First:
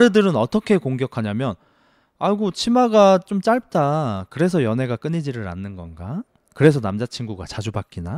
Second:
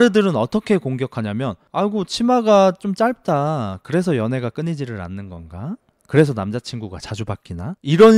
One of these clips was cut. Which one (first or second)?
second